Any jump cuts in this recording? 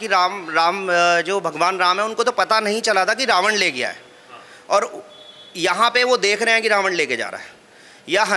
no; 0 cuts

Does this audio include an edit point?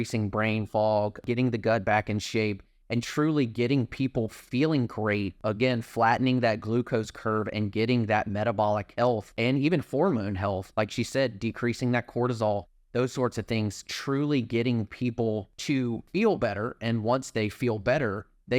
yes; 4 cuts; at 1.2 s, 5.3 s, 8.9 s, 15.9 s

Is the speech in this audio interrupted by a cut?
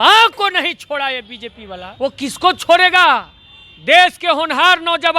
yes; 1 cut; at 1.9 s

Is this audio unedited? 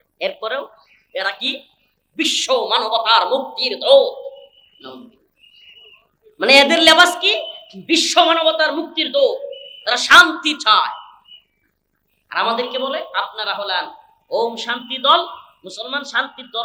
yes; 0 cuts

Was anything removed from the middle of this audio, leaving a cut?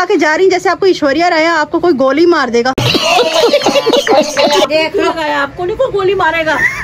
no; 0 cuts

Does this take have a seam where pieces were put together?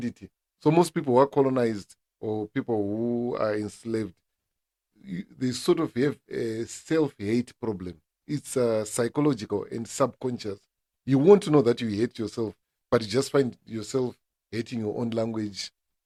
no; 0 cuts

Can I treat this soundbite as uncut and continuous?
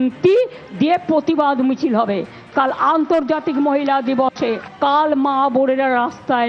yes; 0 cuts

